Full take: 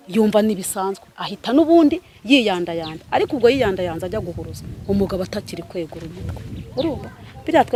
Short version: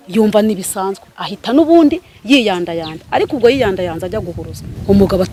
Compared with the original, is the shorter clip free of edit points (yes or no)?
yes